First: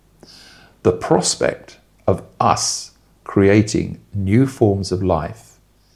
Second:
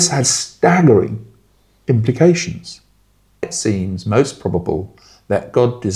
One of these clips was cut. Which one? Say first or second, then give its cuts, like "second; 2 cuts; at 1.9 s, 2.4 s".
second; 1 cut; at 3.4 s